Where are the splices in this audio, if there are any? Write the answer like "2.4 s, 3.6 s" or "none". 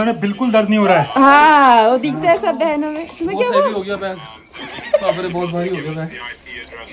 none